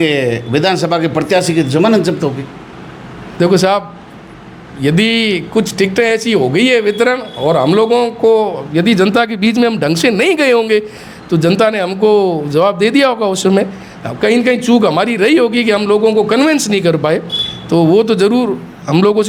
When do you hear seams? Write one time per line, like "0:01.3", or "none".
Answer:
none